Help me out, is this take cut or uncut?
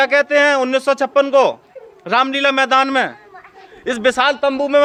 uncut